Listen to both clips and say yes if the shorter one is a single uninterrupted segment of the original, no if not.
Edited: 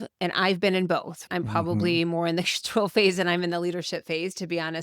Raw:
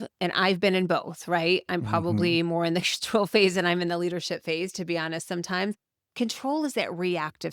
no